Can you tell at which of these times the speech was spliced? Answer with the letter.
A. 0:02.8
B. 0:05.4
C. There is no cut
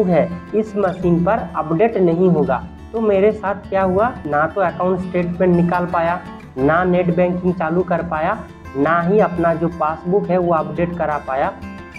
A